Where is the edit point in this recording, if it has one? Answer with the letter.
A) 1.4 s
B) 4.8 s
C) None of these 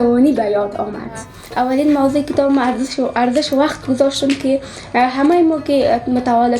A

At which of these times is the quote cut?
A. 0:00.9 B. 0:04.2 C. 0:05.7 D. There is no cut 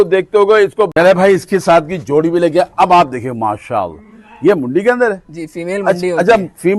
A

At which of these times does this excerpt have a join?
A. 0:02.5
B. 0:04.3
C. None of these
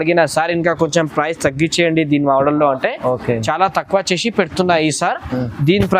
C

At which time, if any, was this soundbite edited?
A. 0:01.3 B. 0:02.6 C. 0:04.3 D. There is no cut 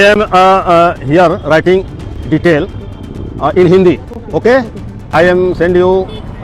D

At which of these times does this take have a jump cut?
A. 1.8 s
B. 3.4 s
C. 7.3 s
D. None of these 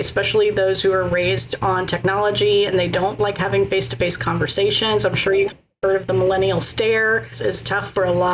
C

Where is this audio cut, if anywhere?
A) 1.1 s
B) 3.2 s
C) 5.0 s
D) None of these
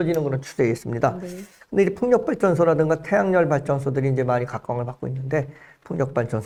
D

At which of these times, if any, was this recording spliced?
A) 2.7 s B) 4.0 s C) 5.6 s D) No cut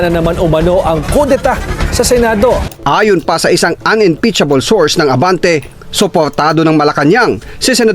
A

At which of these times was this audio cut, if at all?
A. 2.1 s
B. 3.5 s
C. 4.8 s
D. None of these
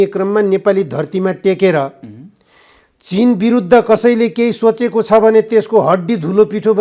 D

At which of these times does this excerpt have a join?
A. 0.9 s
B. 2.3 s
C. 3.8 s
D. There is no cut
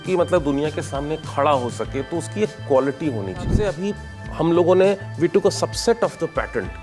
C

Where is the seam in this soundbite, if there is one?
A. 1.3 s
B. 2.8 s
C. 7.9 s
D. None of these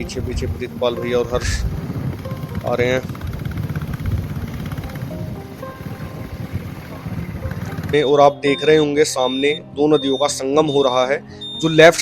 C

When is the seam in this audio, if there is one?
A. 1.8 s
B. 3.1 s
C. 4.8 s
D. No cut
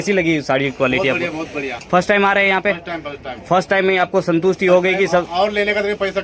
A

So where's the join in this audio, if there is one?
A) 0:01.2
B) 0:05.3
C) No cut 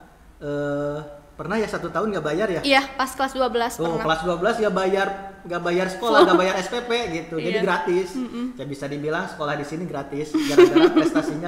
C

